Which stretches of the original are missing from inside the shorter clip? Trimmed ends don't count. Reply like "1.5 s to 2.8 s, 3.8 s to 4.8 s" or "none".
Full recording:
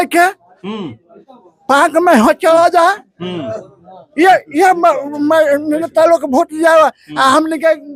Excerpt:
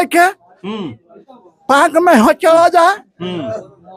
none